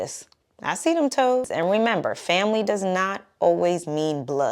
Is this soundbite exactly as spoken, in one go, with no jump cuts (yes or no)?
no